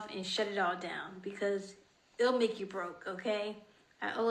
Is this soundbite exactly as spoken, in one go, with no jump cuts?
yes; 0 cuts

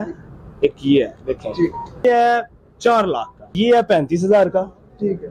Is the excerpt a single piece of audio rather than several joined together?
no; 2 cuts; at 2.0 s, 3.5 s

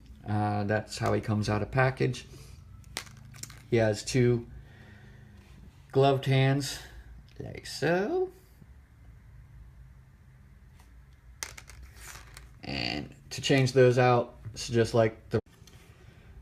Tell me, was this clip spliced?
no; 0 cuts

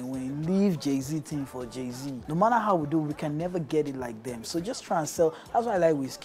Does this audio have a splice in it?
yes; 1 cut; at 2.2 s

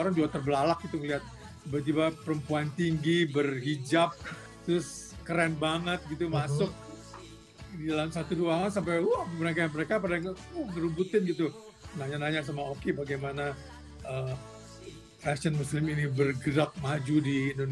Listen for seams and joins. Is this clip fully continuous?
yes; 0 cuts

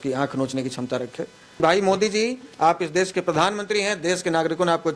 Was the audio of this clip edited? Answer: yes; 1 cut; at 1.6 s

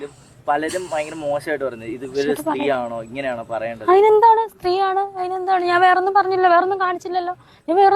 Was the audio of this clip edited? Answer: no; 0 cuts

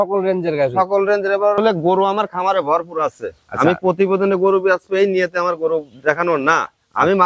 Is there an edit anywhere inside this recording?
yes; 1 cut; at 1.6 s

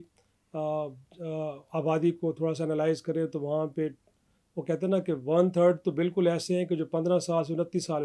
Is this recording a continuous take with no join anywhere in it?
yes; 0 cuts

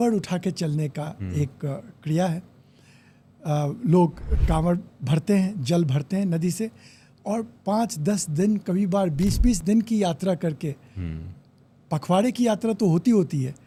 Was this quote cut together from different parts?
no; 0 cuts

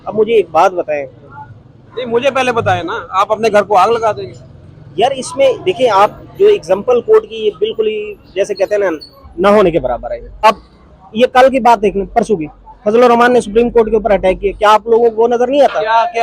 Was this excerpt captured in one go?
no; 1 cut; at 10.4 s

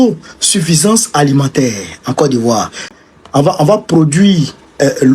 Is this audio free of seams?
no; 1 cut; at 2.9 s

